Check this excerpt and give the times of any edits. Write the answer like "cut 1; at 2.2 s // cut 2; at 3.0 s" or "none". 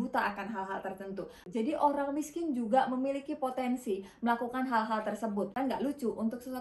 cut 1; at 1.4 s // cut 2; at 5.5 s